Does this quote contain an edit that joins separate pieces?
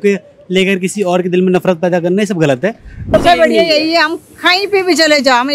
yes; 1 cut; at 3.1 s

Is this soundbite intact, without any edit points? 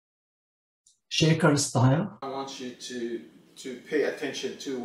no; 1 cut; at 2.2 s

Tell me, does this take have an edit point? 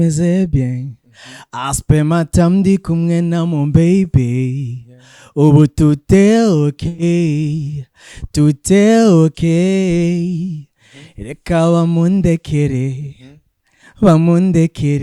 no; 0 cuts

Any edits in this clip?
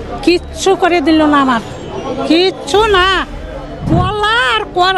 yes; 1 cut; at 3.8 s

